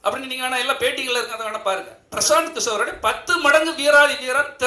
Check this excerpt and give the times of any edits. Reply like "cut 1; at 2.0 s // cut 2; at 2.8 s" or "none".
none